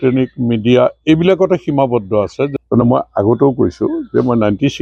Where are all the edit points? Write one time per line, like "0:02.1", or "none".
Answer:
0:02.5